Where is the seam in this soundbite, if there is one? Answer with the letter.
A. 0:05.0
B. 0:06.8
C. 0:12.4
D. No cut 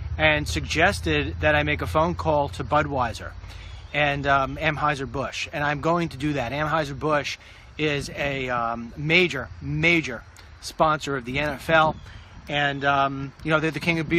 D